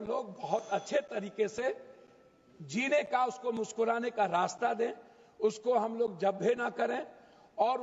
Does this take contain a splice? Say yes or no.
no